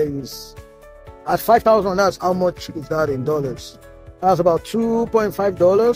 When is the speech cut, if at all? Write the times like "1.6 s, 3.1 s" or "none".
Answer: none

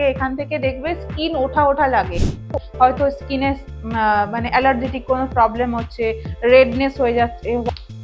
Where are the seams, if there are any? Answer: 2.6 s

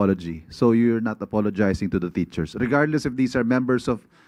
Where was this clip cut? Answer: none

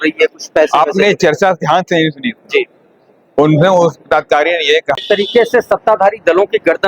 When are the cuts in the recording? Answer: 5.0 s

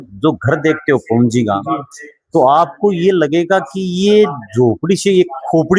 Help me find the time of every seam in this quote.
none

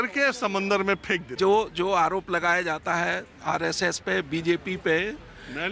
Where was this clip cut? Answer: 1.3 s

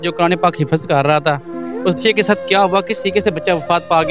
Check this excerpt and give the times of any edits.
2.0 s

